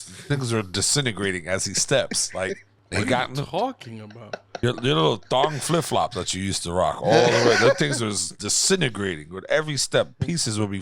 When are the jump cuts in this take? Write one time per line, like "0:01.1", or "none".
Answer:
0:02.7